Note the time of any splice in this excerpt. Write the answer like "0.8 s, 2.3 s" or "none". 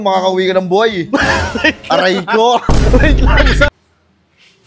3.7 s